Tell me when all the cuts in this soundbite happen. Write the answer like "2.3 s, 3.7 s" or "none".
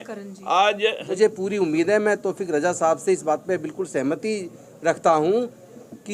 1.2 s